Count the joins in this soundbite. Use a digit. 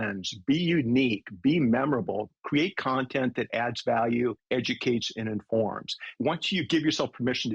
2